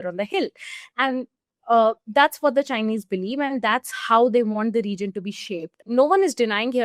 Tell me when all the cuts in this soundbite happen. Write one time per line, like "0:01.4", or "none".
0:05.8